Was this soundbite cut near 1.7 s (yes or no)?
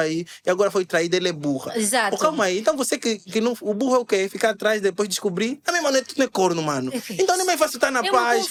no